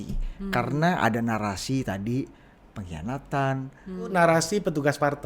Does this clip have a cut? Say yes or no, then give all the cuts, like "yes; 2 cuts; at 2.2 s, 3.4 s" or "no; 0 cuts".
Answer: yes; 1 cut; at 4.1 s